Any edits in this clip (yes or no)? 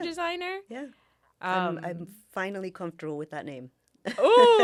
no